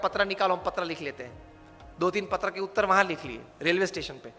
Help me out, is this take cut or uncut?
uncut